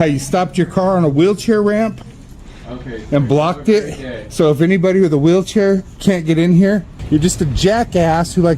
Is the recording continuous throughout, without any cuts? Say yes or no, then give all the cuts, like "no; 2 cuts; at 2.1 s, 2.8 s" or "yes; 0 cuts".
no; 1 cut; at 6.9 s